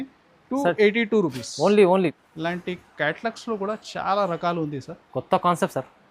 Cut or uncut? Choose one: cut